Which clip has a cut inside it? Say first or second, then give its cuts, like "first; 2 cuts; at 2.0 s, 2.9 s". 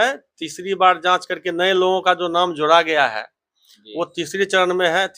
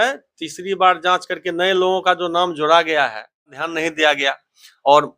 second; 1 cut; at 3.7 s